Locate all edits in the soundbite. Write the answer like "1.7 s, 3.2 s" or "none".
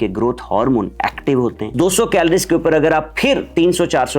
1.7 s